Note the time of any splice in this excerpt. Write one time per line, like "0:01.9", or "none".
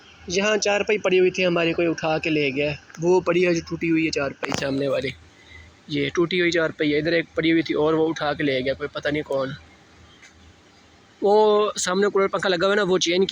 none